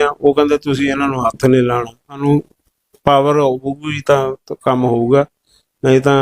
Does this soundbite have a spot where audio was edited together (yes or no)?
yes